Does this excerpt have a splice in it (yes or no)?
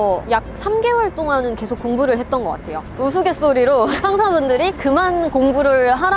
no